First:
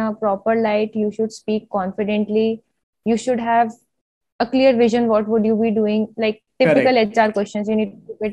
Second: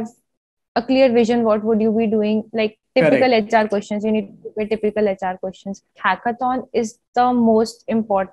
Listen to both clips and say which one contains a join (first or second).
second